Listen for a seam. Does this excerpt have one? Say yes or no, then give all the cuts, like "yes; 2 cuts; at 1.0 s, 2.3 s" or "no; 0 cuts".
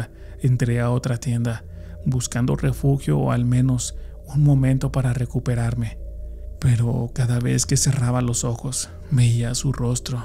yes; 1 cut; at 6.4 s